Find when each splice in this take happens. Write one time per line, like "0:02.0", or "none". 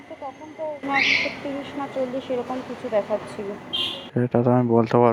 none

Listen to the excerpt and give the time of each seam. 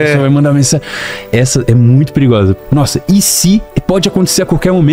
0:02.6
0:03.7

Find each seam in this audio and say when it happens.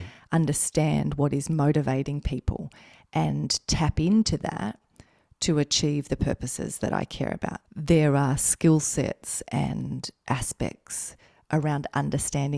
0:07.6

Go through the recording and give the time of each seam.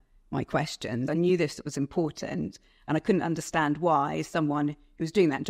0:01.1

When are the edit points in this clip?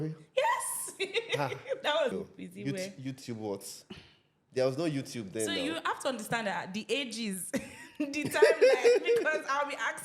0:02.1

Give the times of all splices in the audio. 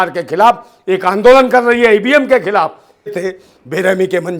0:03.2

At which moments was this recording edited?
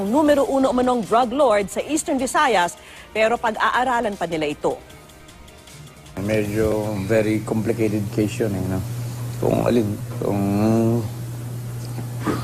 0:06.4

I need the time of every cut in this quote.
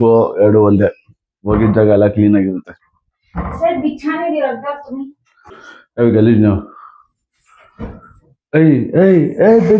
0:05.4

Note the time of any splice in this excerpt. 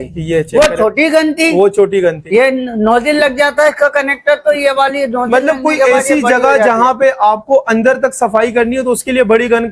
none

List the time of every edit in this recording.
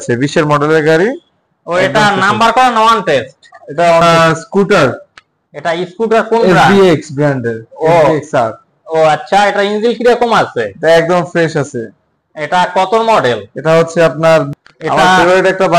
0:04.0
0:14.5

